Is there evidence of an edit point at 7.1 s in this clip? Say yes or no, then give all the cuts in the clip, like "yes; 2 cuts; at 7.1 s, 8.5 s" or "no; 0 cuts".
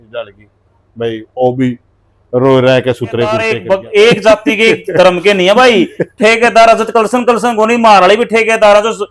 no; 1 cut; at 3.5 s